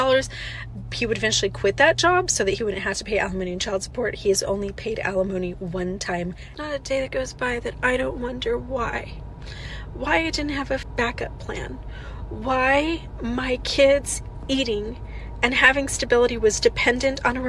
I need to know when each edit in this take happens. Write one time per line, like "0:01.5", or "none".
0:06.5
0:10.9